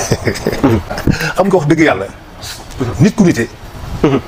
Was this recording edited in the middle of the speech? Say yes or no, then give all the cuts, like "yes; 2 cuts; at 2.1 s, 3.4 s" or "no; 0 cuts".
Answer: no; 0 cuts